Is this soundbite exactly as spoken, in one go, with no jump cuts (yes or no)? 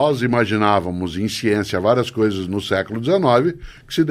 yes